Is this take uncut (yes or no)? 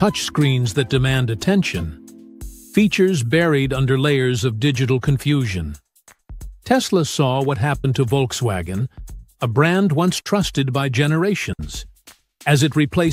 no